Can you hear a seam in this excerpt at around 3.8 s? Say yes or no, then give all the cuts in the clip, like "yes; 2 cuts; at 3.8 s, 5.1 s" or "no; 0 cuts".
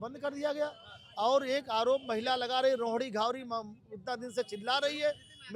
no; 0 cuts